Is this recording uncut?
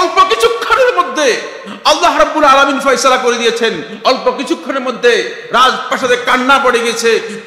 yes; 0 cuts

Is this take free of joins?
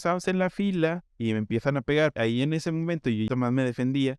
no; 3 cuts; at 1.1 s, 2.1 s, 3.3 s

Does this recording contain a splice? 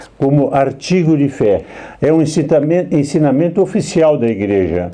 yes; 1 cut; at 1.6 s

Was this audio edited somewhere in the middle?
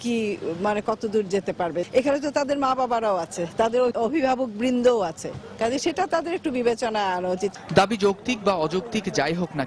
no; 0 cuts

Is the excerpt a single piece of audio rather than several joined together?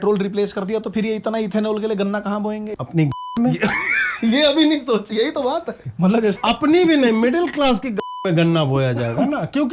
no; 1 cut; at 2.8 s

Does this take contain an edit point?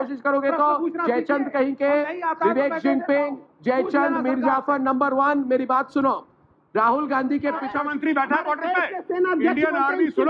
yes; 1 cut; at 7.7 s

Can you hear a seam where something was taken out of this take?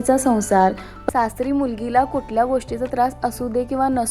yes; 1 cut; at 1.0 s

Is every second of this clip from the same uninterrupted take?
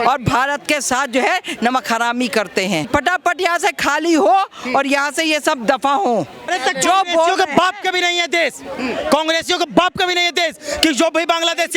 no; 2 cuts; at 2.9 s, 6.4 s

